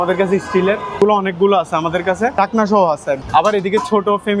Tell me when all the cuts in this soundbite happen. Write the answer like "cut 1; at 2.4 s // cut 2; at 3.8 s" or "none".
cut 1; at 1.0 s // cut 2; at 2.3 s // cut 3; at 3.2 s